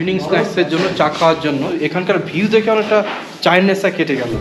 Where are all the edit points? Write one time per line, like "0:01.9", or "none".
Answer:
0:01.8